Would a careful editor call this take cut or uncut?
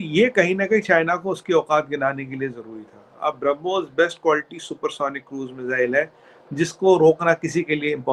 uncut